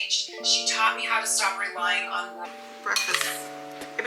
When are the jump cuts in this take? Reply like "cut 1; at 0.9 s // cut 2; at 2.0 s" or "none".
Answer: cut 1; at 2.5 s